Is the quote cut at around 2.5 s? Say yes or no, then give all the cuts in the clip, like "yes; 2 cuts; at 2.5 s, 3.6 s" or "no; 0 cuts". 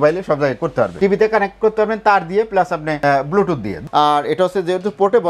no; 2 cuts; at 1.0 s, 3.8 s